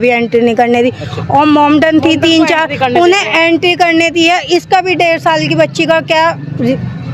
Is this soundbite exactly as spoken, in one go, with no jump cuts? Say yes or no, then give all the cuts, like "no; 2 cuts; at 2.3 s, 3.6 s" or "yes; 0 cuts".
yes; 0 cuts